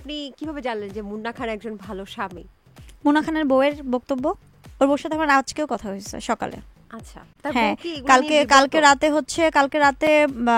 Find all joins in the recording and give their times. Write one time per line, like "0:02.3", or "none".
none